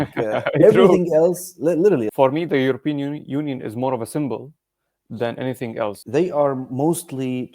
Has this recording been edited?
yes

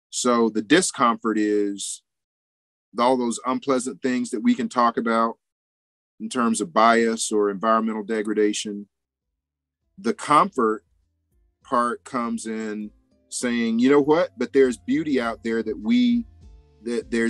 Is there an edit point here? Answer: no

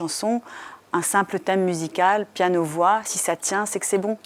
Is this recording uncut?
yes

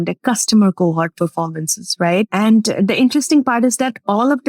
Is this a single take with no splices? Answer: no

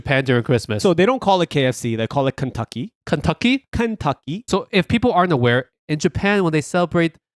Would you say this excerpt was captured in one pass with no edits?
no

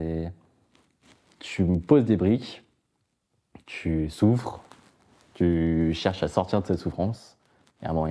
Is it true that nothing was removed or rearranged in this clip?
yes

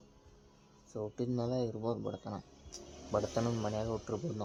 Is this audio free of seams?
yes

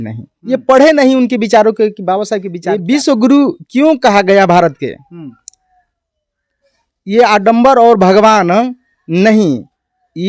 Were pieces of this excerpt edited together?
yes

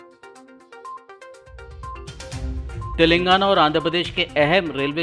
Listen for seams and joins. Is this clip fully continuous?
no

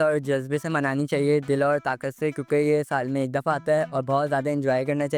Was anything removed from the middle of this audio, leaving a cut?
no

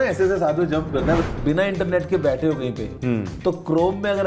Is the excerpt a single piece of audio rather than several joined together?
no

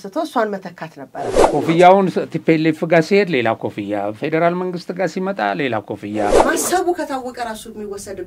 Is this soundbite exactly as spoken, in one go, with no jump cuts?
no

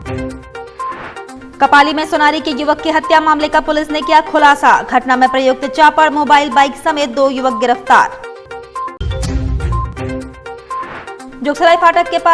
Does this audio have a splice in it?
yes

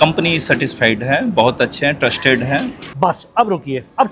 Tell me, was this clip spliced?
yes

